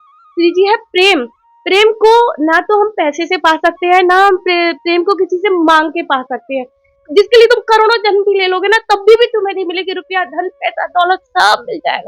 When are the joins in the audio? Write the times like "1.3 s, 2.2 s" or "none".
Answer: 7.0 s